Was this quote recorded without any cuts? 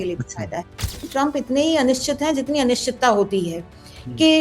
no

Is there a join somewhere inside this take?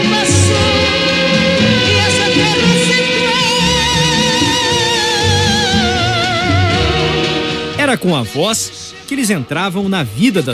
no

